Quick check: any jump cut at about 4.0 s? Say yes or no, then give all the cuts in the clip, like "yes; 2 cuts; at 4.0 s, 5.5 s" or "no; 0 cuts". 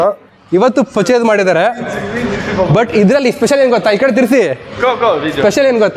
no; 0 cuts